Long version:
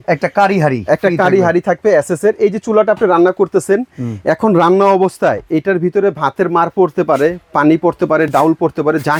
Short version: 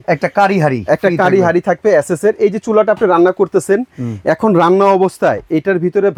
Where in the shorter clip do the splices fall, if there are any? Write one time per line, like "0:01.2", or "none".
none